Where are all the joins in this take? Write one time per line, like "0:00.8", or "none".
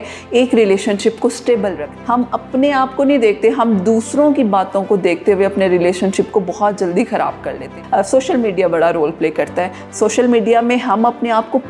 0:01.9
0:07.7